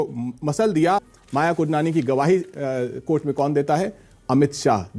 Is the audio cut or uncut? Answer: cut